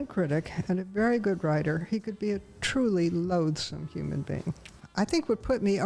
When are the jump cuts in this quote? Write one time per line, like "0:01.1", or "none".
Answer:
0:04.8